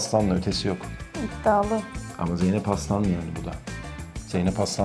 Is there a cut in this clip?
no; 0 cuts

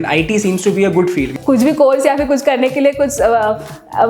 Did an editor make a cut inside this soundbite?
yes; 1 cut; at 1.3 s

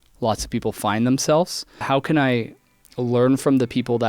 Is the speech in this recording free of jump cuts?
no; 1 cut; at 1.7 s

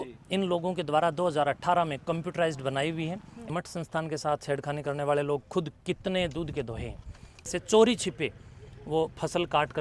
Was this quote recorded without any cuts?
no; 2 cuts; at 3.5 s, 7.3 s

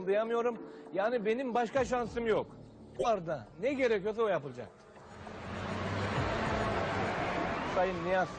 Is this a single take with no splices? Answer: no; 1 cut; at 3.0 s

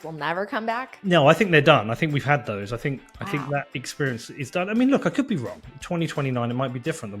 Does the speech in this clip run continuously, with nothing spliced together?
no; 1 cut; at 0.9 s

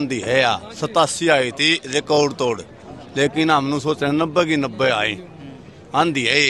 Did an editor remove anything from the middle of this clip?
no; 0 cuts

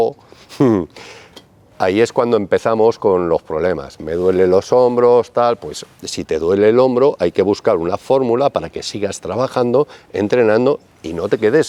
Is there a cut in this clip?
no; 0 cuts

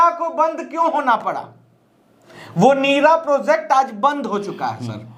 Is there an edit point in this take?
no; 0 cuts

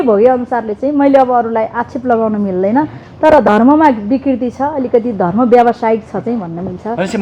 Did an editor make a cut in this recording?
no; 0 cuts

